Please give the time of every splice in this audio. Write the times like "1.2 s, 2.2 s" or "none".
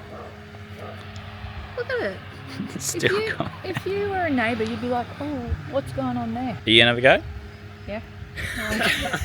6.6 s

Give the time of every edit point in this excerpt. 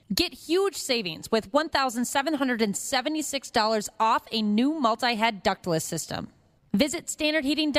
none

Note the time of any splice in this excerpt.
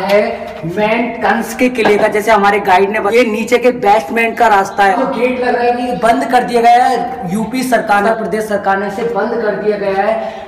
3.1 s, 5.0 s, 8.1 s

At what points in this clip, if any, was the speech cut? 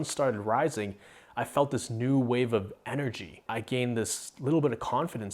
3.4 s

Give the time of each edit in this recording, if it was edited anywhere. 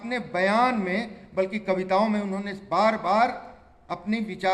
none

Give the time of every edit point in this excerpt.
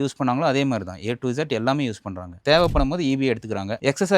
2.3 s

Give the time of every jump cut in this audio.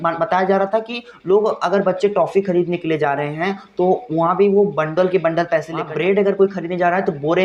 5.8 s

